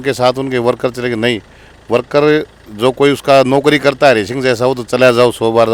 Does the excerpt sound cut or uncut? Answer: uncut